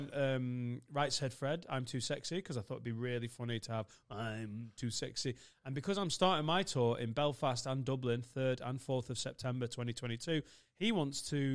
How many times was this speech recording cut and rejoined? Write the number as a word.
zero